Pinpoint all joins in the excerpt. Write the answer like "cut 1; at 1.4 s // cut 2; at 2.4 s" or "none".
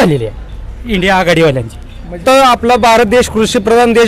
cut 1; at 2.2 s